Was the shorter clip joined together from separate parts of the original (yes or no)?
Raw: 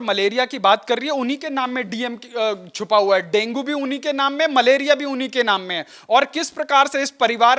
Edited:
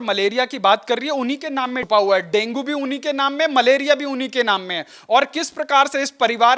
yes